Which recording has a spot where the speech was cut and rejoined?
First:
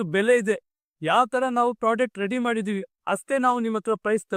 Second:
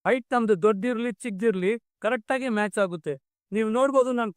second; 1 cut; at 3.3 s

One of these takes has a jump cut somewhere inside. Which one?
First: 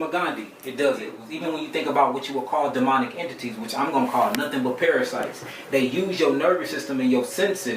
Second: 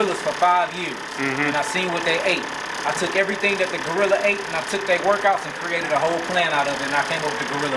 first; 1 cut; at 1.3 s

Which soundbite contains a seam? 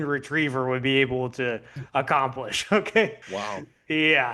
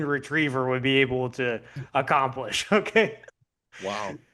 first; 1 cut; at 3.2 s

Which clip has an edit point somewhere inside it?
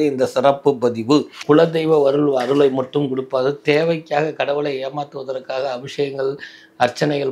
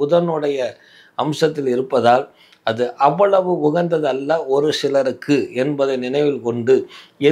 first; 1 cut; at 1.3 s

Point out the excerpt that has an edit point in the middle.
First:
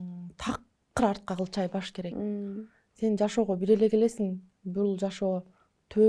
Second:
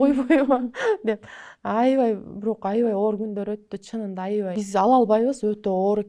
second; 1 cut; at 4.5 s

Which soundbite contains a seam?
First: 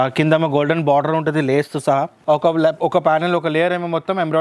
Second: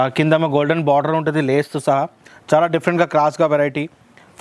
first; 1 cut; at 2.1 s

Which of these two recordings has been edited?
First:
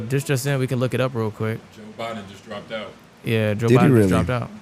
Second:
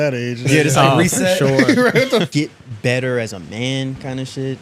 second; 1 cut; at 2.3 s

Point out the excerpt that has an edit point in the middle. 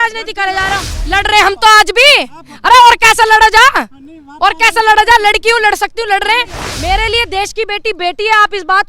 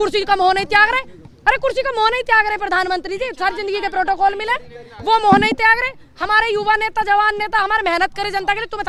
first; 2 cuts; at 0.9 s, 6.6 s

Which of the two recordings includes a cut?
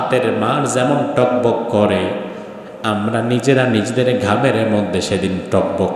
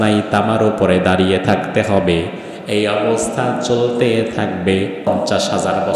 second; 1 cut; at 5.0 s

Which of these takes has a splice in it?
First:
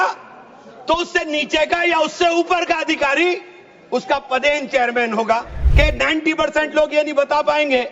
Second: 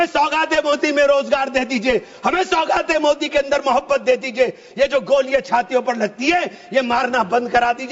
first; 1 cut; at 5.6 s

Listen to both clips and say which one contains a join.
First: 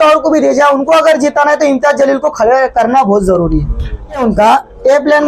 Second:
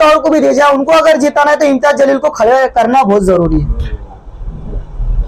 first; 1 cut; at 4.2 s

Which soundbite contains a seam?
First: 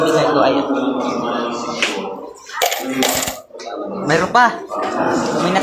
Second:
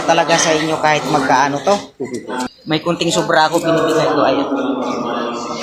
second; 1 cut; at 2.5 s

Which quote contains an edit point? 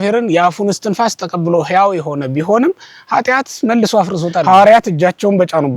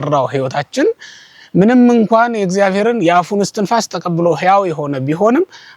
first; 1 cut; at 4.4 s

